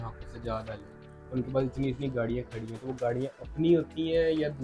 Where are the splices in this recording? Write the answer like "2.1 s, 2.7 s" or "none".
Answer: none